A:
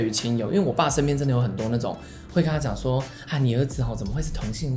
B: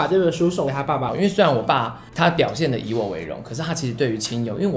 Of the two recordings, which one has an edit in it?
B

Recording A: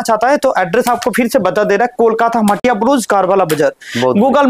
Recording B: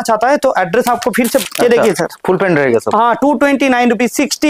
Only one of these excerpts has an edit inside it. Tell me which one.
B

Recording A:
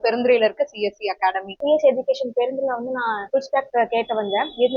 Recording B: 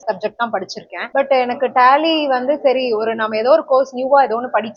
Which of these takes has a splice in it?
A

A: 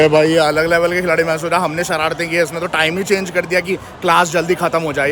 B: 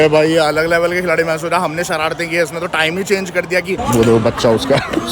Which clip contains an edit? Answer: B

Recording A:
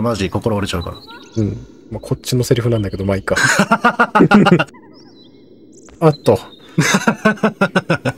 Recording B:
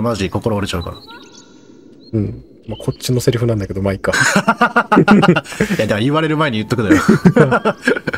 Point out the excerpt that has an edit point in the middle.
A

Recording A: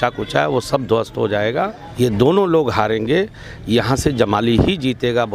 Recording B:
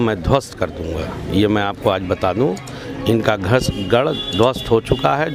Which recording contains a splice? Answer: A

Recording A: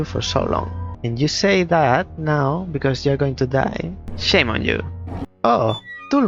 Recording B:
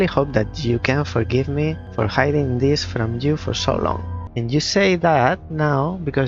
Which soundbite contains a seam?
A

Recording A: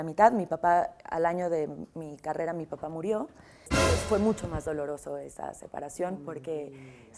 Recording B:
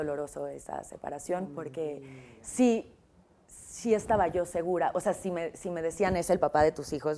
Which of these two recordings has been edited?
A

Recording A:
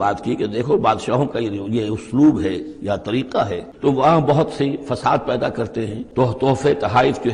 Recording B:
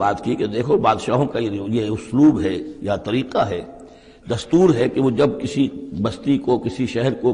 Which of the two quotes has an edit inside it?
A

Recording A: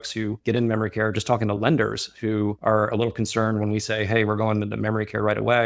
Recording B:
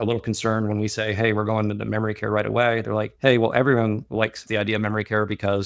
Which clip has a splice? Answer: B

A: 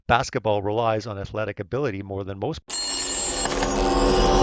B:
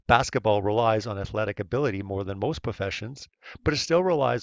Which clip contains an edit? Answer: B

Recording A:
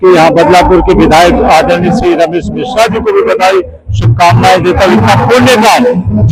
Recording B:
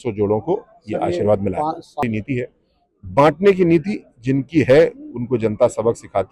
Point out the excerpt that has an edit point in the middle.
B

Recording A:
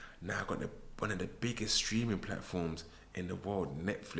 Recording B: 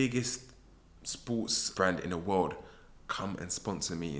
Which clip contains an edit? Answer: B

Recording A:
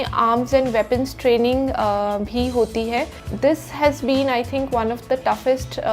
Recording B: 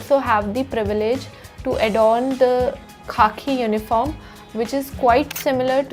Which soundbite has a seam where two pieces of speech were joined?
A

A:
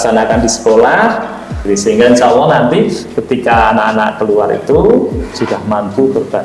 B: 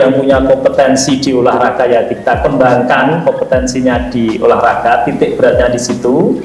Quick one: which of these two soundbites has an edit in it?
A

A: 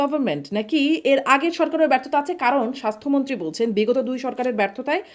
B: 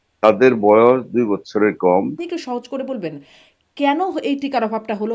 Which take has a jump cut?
B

